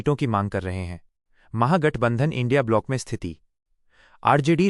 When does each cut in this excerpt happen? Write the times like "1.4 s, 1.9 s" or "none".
none